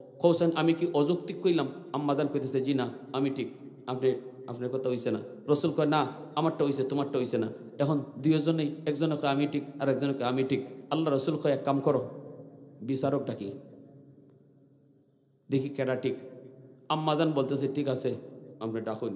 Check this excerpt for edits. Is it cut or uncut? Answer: uncut